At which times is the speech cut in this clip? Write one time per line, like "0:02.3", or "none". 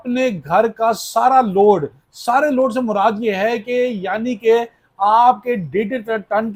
none